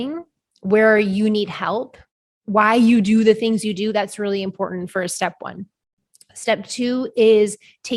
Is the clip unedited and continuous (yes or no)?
yes